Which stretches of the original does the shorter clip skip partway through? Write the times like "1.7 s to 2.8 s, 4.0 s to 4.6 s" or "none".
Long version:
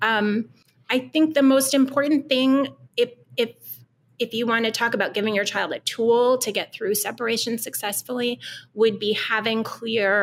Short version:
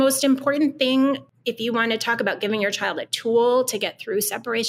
2.8 s to 4.0 s